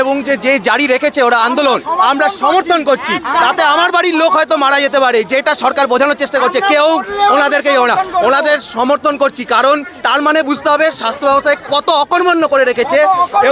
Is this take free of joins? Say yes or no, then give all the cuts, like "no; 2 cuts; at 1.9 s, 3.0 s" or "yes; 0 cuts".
yes; 0 cuts